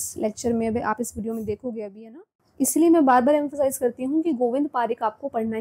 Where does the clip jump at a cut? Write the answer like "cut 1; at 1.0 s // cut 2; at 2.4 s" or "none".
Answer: cut 1; at 2.4 s